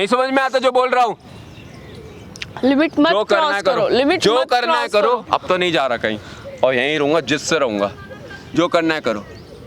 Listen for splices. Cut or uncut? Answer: uncut